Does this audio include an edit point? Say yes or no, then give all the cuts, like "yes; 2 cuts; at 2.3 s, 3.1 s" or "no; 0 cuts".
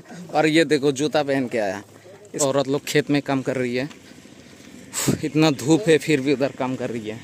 yes; 1 cut; at 2.3 s